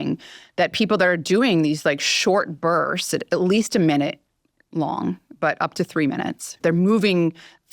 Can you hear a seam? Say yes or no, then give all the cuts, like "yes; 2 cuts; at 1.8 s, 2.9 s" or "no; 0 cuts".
yes; 1 cut; at 6.6 s